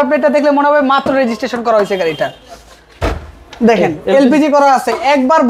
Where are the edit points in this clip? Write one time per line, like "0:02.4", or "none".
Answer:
none

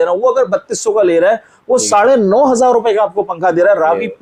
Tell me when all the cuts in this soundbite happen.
none

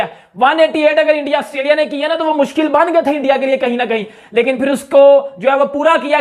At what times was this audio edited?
none

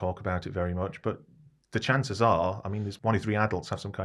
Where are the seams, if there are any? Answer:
0:02.9

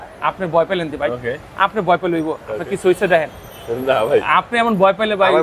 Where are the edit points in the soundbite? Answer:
none

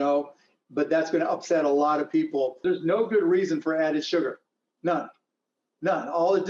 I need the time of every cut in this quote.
0:02.6

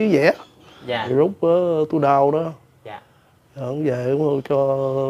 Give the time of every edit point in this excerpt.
0:01.0

